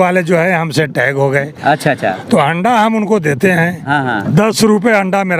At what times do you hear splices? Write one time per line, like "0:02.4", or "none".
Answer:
none